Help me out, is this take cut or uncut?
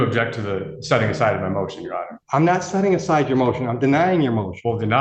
cut